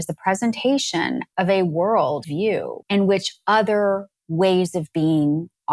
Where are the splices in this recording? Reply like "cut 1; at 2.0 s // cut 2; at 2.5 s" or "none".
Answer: cut 1; at 1.2 s // cut 2; at 2.2 s